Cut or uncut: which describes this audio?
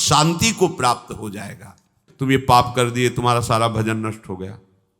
cut